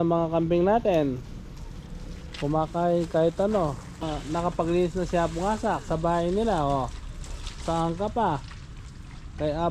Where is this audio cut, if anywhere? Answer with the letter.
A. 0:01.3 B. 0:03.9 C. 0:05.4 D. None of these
B